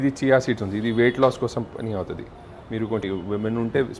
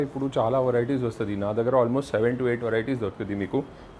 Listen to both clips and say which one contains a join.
first; 1 cut; at 3.0 s

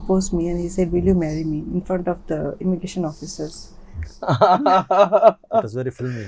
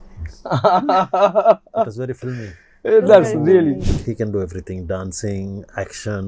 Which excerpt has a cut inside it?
second; 1 cut; at 3.9 s

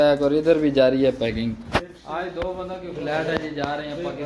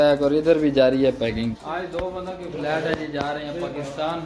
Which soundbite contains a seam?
second; 1 cut; at 1.6 s

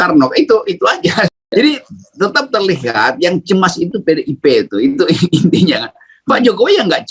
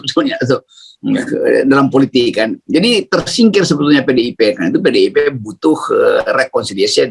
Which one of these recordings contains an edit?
first; 1 cut; at 1.4 s

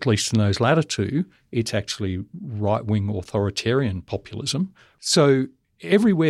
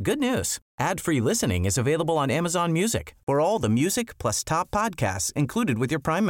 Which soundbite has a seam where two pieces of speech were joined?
first; 1 cut; at 4.9 s

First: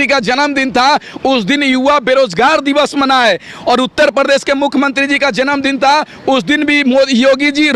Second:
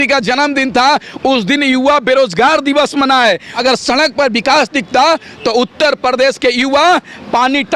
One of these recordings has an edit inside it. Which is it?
second; 1 cut; at 3.5 s

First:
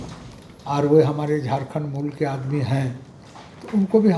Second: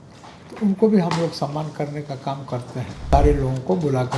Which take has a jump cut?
second; 1 cut; at 3.1 s

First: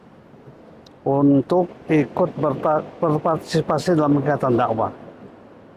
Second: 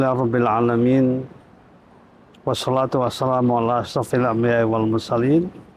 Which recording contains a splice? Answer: second; 1 cut; at 4.6 s

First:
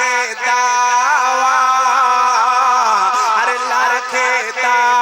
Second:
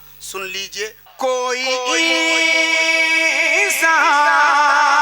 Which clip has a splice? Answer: second; 1 cut; at 1.0 s

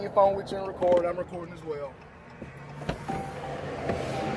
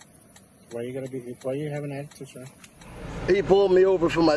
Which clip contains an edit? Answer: second; 1 cut; at 3.1 s

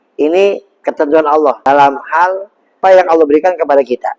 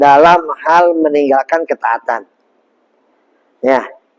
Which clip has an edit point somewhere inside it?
first; 2 cuts; at 1.6 s, 2.8 s

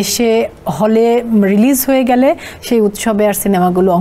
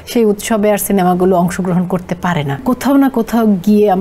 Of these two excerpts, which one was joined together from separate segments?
second; 1 cut; at 2.6 s

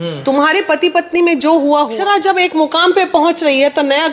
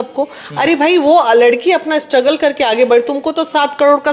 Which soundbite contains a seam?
first; 1 cut; at 1.9 s

